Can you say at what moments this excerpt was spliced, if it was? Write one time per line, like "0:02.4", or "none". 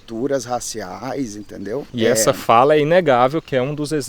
0:01.9